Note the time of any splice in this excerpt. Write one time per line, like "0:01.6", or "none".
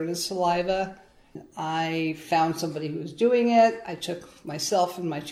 0:01.5